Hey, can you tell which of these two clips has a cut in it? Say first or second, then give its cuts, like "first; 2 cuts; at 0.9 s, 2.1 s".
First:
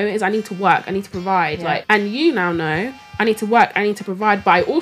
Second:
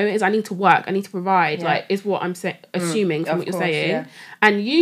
first; 1 cut; at 1.8 s